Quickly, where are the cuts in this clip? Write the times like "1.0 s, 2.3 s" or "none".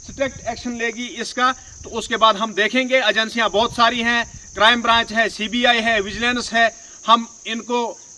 none